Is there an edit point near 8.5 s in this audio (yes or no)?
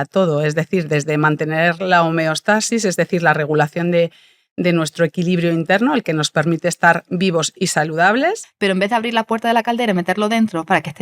yes